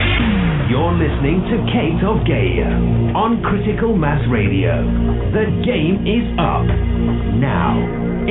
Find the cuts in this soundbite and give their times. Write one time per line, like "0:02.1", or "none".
none